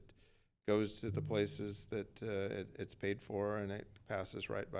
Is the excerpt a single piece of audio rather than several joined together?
yes; 0 cuts

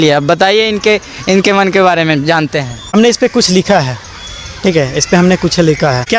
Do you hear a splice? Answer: no; 0 cuts

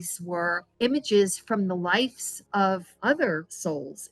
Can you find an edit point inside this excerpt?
no; 0 cuts

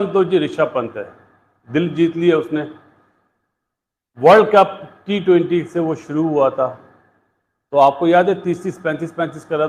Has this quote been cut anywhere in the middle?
no; 0 cuts

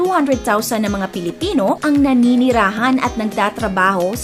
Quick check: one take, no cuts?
yes; 0 cuts

